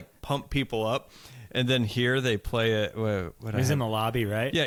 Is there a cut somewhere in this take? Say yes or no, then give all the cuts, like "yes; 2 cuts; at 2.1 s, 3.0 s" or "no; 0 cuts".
no; 0 cuts